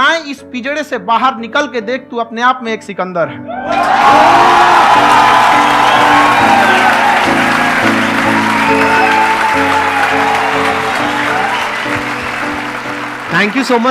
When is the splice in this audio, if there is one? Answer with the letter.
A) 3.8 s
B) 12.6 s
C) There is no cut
C